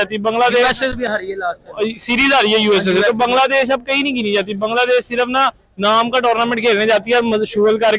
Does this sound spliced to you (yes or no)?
no